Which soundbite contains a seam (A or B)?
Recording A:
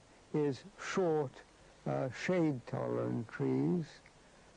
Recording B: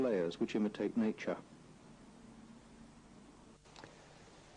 B